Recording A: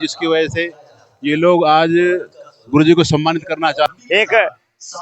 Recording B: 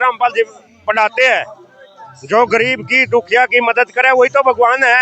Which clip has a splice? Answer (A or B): A